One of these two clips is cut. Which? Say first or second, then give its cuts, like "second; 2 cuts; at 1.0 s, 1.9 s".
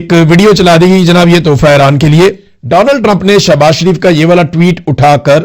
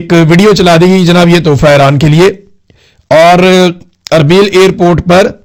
first; 1 cut; at 2.5 s